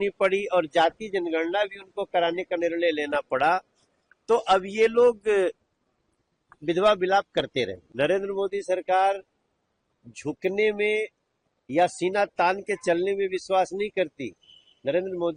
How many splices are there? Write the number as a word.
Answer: one